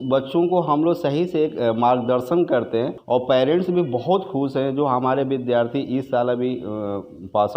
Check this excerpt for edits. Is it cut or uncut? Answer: cut